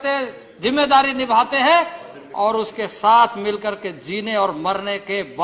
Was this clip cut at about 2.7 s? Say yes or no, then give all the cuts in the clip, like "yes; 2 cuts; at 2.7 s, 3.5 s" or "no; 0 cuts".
no; 0 cuts